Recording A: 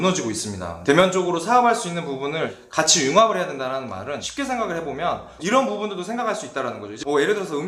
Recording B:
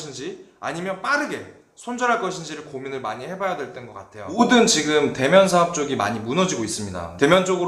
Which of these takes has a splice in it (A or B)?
B